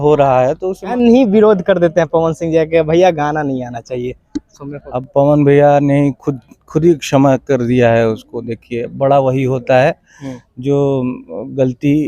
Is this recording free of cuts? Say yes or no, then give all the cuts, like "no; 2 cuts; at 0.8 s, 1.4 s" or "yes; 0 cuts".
no; 2 cuts; at 0.9 s, 5.0 s